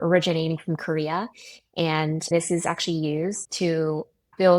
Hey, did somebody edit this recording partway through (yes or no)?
yes